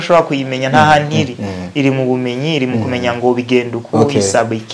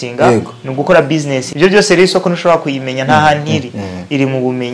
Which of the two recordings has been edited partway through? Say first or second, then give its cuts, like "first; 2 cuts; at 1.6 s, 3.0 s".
second; 1 cut; at 1.4 s